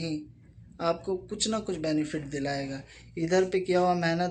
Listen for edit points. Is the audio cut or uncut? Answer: uncut